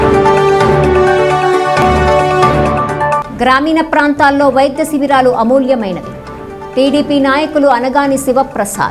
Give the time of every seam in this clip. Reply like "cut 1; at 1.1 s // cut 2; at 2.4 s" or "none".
none